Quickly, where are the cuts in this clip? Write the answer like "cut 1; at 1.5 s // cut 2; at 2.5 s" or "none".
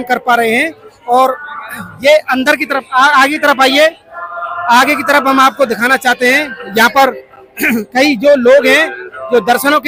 none